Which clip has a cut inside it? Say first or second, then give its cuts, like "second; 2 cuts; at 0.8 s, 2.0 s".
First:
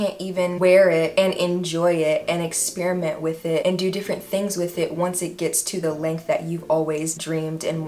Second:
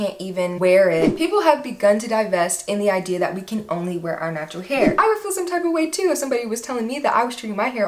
second; 2 cuts; at 1.1 s, 4.9 s